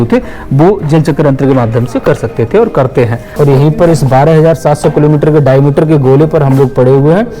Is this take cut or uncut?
cut